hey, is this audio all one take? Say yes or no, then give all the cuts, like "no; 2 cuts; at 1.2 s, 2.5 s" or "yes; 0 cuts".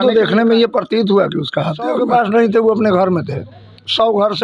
no; 1 cut; at 2.0 s